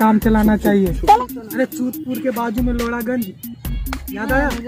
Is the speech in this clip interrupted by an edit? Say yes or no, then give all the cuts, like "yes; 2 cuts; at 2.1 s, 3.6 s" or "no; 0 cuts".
yes; 1 cut; at 1.0 s